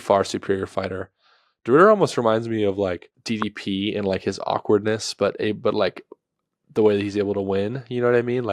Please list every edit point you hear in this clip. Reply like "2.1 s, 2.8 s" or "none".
3.1 s